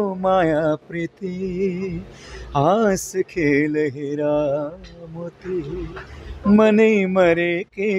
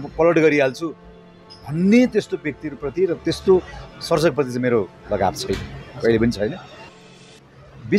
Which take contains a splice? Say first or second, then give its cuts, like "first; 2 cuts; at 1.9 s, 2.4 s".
second; 1 cut; at 6.9 s